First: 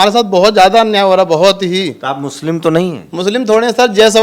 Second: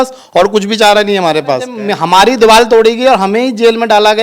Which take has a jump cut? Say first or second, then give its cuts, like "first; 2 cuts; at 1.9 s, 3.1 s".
second; 1 cut; at 1.8 s